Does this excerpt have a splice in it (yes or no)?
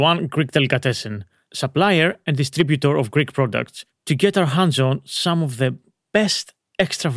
no